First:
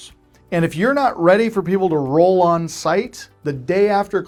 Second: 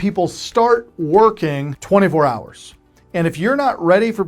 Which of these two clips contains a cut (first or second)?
second